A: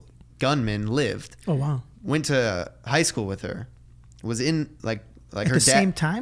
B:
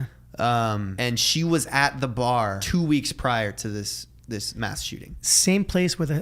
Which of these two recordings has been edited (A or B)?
B